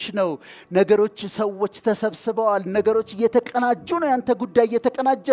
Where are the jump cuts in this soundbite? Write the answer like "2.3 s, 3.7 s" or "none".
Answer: none